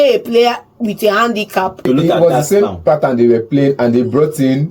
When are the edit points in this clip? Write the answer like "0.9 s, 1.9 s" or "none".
1.9 s